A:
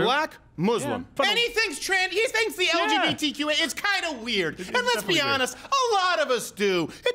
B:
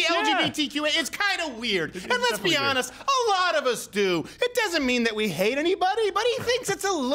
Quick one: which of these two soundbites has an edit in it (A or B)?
A